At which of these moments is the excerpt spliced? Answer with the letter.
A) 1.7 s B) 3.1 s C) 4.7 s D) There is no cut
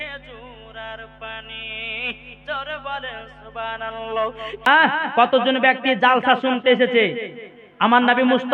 C